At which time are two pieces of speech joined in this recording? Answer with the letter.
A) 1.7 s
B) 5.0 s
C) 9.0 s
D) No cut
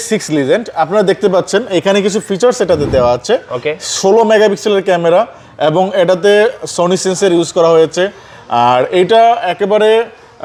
D